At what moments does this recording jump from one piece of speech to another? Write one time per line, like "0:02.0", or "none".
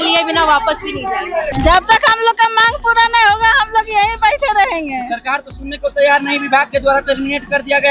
0:01.5